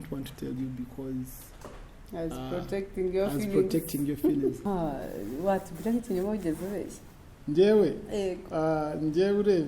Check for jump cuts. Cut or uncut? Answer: cut